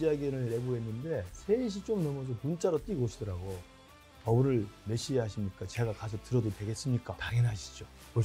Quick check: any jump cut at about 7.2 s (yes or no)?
yes